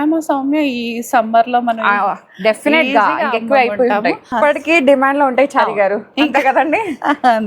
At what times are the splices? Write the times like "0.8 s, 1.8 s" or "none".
4.3 s